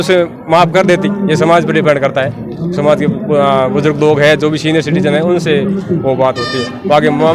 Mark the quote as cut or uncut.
uncut